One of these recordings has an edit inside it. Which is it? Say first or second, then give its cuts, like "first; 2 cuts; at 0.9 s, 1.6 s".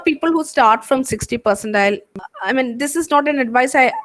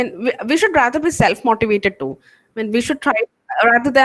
first; 1 cut; at 2.1 s